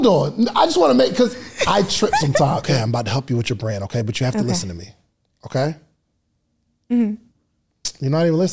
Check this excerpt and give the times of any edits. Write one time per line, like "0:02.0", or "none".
0:02.6